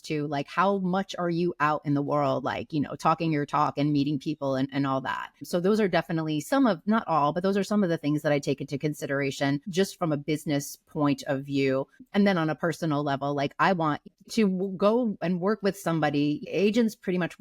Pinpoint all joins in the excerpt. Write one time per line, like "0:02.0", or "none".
0:12.0
0:14.1
0:16.4